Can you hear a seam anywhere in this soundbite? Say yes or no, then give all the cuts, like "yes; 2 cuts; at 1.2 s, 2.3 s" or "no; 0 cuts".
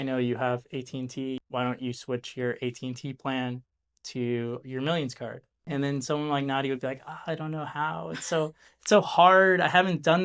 yes; 2 cuts; at 1.4 s, 5.6 s